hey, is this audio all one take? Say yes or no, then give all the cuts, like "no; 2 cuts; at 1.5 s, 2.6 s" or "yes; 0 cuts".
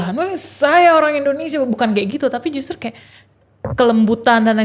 yes; 0 cuts